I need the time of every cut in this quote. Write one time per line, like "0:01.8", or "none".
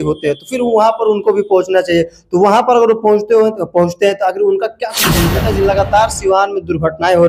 0:05.3